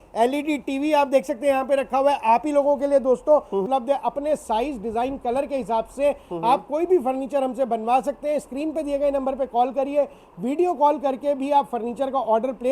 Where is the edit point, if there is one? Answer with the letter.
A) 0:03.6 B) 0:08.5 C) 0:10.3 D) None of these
A